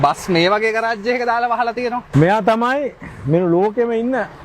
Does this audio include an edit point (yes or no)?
yes